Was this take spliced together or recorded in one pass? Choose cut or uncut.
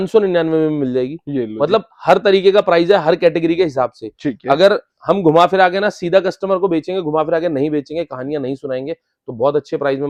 uncut